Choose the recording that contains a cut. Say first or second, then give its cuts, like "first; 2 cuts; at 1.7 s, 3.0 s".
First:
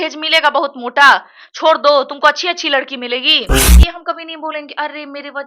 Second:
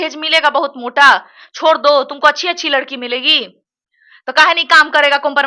first; 1 cut; at 3.7 s